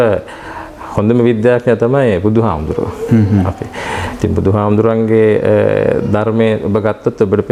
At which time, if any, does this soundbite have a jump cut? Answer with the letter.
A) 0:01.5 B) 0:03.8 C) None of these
C